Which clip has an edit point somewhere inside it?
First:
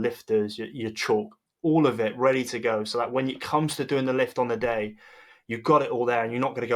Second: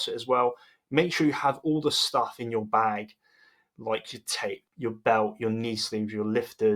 second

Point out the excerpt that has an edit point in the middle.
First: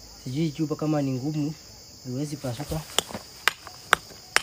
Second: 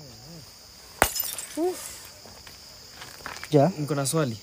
second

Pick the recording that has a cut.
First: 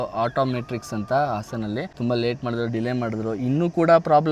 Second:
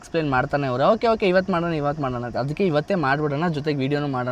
first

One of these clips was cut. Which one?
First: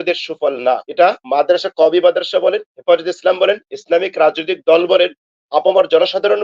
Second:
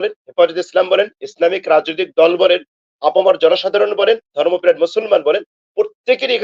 first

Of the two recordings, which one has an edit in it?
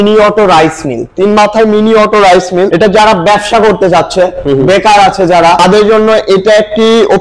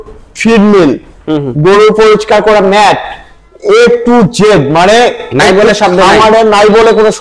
first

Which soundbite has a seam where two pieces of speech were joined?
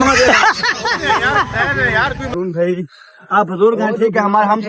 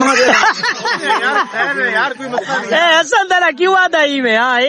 first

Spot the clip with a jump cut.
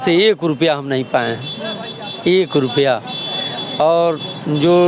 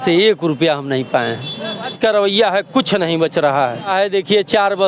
second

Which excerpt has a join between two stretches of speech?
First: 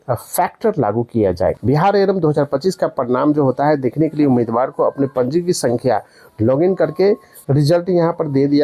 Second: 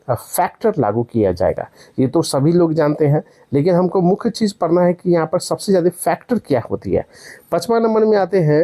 first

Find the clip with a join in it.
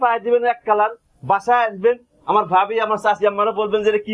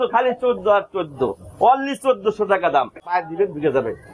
second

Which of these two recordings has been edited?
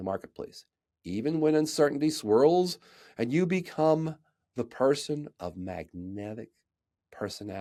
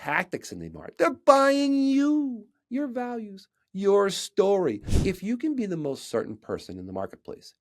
second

